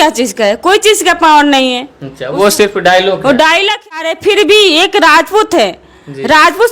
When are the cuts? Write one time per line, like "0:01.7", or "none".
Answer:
0:04.0

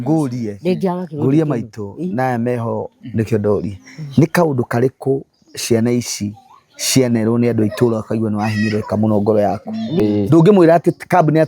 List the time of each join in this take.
0:09.9

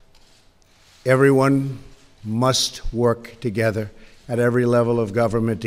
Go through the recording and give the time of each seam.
0:01.8

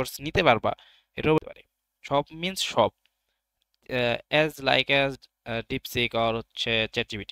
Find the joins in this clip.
0:01.4

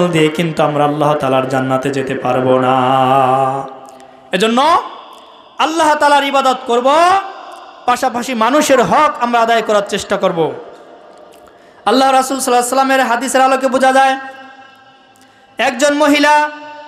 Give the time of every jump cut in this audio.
none

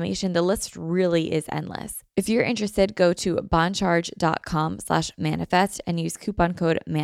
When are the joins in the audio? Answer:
0:02.0

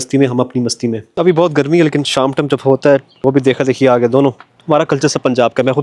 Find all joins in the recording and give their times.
0:01.1
0:03.1
0:04.5

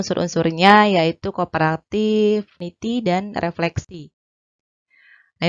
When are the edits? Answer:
0:02.6

